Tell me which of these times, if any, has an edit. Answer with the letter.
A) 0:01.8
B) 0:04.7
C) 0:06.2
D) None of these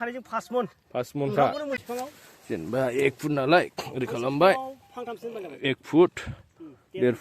A